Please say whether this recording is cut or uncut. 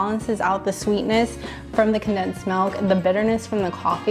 uncut